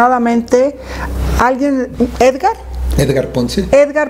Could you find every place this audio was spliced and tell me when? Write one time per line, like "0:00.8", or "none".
none